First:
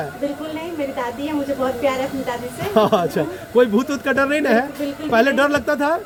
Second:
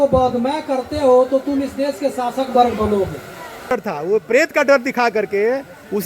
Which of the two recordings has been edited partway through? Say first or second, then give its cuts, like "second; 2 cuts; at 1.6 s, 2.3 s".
second; 1 cut; at 3.8 s